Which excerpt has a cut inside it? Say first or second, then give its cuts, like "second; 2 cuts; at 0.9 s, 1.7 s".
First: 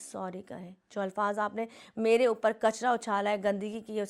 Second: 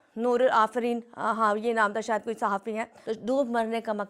second; 1 cut; at 2.9 s